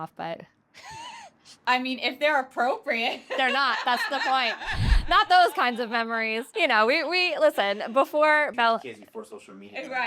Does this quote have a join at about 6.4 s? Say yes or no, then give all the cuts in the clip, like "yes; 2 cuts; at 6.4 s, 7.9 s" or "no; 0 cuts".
yes; 2 cuts; at 6.4 s, 8.5 s